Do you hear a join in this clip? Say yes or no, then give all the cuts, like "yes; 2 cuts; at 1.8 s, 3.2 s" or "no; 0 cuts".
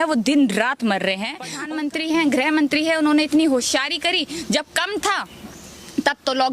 yes; 1 cut; at 1.5 s